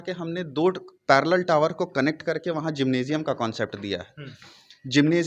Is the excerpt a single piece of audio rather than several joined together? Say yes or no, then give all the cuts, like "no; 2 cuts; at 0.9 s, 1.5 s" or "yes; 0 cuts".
yes; 0 cuts